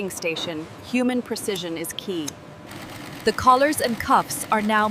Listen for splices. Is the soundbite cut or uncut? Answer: cut